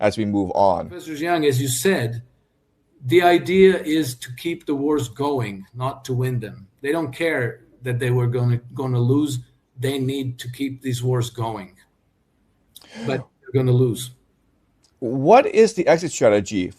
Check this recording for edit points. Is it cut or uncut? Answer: cut